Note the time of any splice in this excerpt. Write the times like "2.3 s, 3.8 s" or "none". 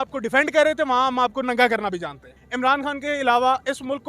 2.3 s